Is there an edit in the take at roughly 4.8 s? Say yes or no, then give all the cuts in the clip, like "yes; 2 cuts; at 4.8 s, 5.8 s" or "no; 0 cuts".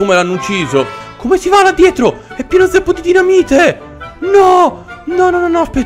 no; 1 cut; at 1.0 s